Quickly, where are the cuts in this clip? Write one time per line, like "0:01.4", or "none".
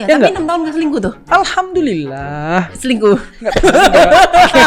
none